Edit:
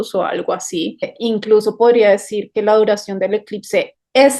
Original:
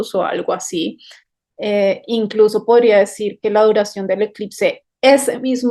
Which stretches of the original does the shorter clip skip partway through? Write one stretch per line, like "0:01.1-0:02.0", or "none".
0:01.1-0:02.0